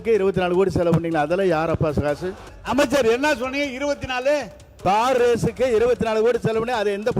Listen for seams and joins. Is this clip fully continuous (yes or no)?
yes